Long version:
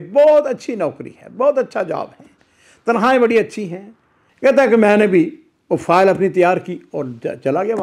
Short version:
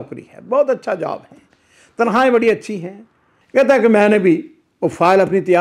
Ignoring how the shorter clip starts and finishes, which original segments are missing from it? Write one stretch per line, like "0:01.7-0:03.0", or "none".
none